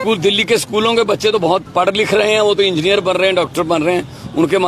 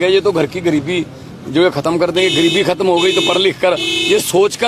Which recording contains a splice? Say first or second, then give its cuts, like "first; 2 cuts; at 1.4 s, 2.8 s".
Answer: first; 1 cut; at 1.7 s